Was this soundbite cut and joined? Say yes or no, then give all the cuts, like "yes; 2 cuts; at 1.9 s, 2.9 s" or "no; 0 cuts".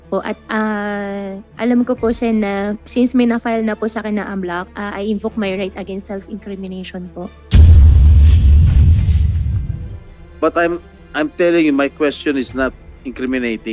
yes; 2 cuts; at 7.3 s, 9.9 s